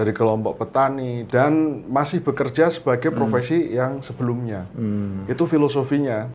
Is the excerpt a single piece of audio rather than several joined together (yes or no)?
no